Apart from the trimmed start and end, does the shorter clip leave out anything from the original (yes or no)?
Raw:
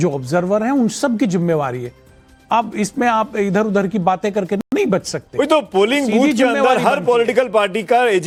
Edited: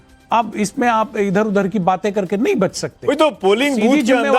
yes